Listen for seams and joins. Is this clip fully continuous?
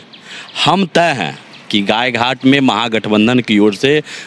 yes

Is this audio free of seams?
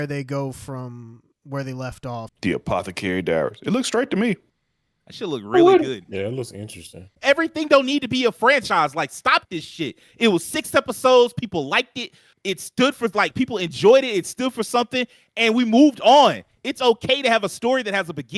no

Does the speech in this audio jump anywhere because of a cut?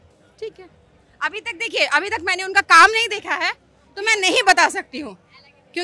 no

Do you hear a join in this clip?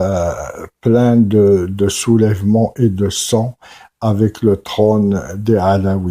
yes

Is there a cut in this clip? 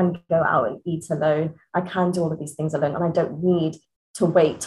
no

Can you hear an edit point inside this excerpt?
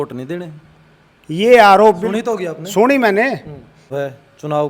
yes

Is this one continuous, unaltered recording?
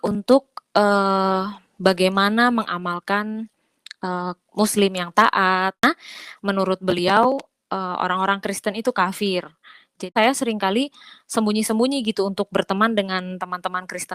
no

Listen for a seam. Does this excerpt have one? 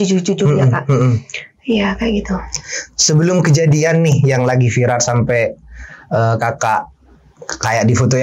no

